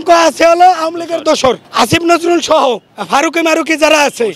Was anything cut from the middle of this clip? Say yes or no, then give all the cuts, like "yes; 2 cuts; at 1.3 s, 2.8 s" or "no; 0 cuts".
yes; 2 cuts; at 1.7 s, 2.9 s